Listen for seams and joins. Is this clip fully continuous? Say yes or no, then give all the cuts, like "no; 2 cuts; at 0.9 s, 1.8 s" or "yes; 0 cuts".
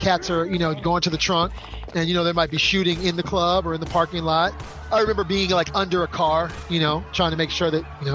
yes; 0 cuts